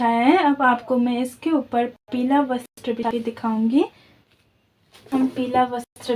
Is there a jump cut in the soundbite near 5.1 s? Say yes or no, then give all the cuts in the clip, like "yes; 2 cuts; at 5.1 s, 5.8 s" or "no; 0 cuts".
yes; 1 cut; at 5.1 s